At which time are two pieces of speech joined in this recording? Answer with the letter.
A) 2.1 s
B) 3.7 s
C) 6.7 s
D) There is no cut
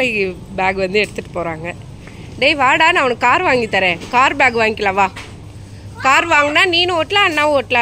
D